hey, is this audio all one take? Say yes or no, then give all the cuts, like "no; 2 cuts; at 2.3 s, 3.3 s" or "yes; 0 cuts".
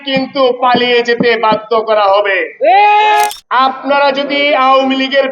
no; 1 cut; at 3.3 s